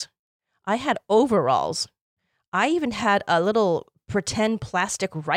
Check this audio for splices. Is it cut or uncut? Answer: uncut